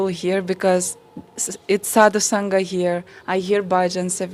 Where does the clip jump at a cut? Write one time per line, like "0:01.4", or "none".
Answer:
none